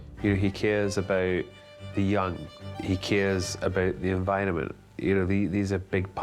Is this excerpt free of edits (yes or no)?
no